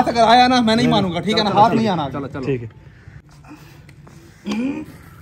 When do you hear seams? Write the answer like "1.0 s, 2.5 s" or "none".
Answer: 3.2 s

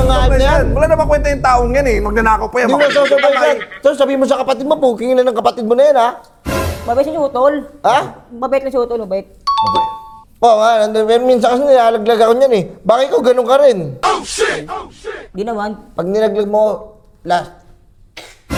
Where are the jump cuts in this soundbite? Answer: none

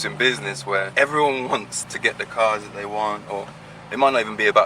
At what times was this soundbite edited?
0.9 s, 1.8 s

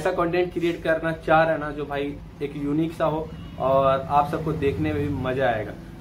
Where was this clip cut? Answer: none

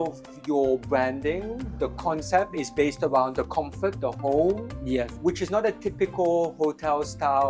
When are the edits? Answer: none

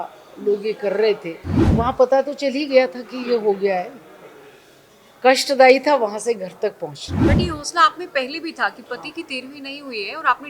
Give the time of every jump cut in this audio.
1.6 s, 7.1 s

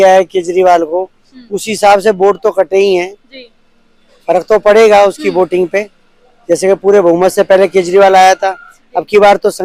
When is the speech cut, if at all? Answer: none

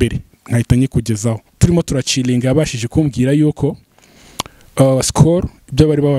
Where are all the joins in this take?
1.5 s

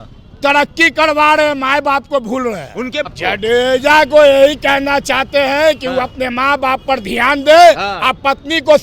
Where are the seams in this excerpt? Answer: 3.1 s

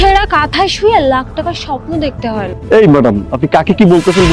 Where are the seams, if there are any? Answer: 2.5 s

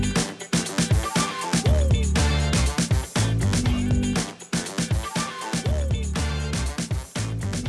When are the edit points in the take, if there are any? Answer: 6.7 s

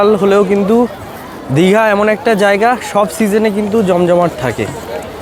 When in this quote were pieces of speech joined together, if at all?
none

